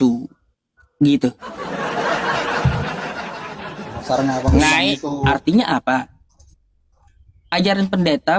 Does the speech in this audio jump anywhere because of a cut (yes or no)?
yes